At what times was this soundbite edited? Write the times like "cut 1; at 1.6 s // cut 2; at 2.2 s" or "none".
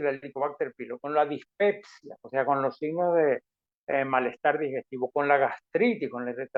none